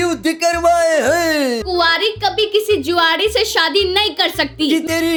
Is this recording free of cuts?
yes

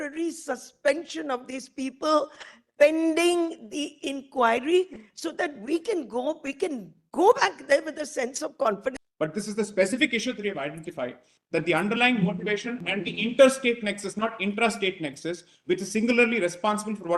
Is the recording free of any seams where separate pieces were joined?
no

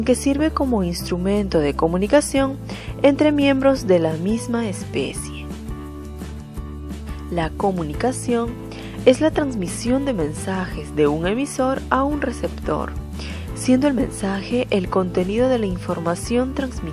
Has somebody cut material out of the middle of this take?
no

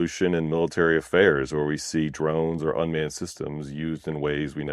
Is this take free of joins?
yes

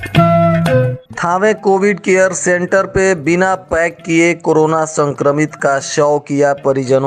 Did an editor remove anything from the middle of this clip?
yes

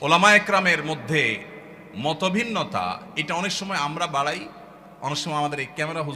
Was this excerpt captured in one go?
yes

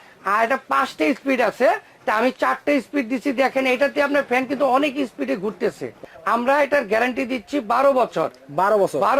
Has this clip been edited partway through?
yes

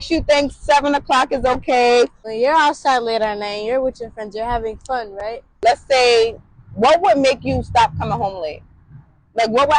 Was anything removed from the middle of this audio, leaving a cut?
yes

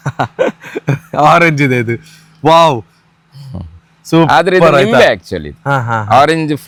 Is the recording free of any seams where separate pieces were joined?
yes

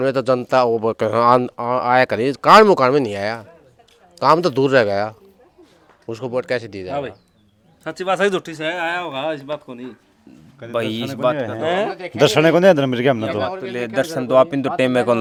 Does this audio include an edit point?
no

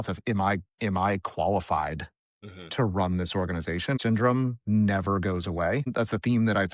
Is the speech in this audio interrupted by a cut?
yes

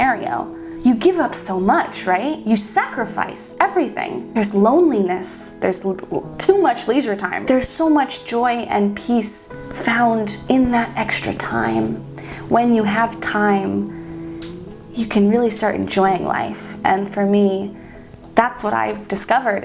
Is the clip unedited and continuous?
no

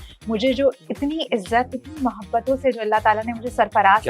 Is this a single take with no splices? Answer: no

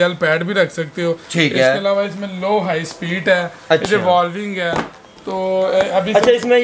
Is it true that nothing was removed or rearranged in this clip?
yes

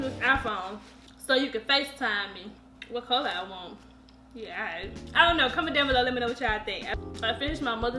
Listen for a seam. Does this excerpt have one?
no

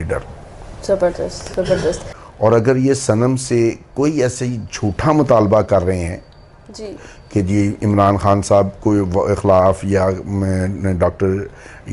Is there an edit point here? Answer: yes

